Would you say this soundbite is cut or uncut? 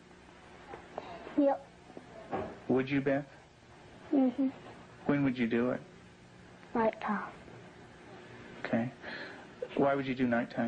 cut